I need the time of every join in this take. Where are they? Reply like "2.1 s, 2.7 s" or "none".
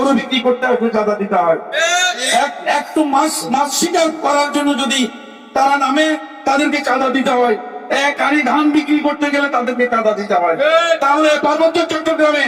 none